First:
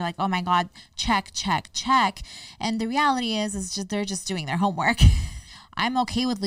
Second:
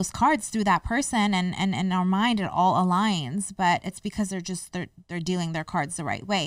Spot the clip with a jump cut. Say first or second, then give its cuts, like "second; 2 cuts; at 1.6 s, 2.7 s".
first; 1 cut; at 5.6 s